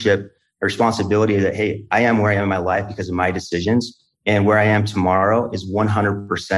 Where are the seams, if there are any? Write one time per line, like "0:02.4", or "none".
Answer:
none